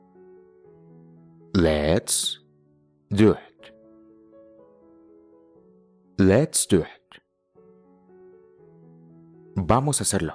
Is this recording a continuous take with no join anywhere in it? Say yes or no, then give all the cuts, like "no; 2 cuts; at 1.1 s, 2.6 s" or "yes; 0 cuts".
yes; 0 cuts